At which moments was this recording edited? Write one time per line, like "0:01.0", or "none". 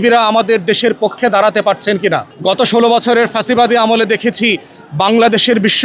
0:02.3